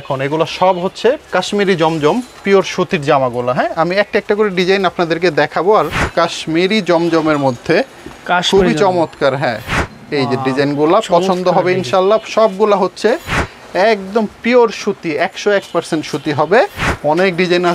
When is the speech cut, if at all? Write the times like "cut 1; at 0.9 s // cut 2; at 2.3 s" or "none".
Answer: cut 1; at 1.2 s // cut 2; at 6.1 s // cut 3; at 16.8 s